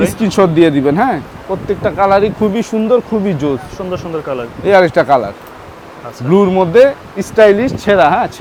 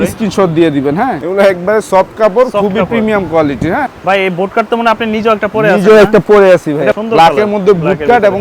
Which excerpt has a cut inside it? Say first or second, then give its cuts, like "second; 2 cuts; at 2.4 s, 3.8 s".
second; 3 cuts; at 1.2 s, 3.9 s, 7.0 s